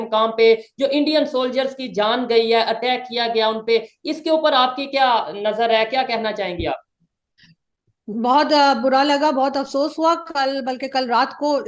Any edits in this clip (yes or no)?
no